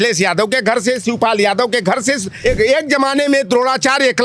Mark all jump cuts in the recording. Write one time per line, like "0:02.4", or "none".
0:02.3